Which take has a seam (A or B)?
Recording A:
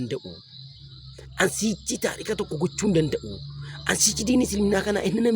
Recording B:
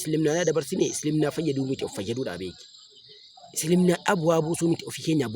A